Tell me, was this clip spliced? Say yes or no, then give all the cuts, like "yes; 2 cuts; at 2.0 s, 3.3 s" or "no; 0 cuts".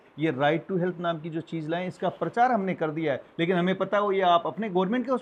no; 0 cuts